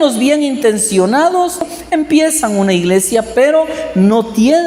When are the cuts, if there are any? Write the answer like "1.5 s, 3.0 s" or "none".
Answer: 1.7 s